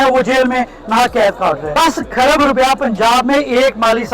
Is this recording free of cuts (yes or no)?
no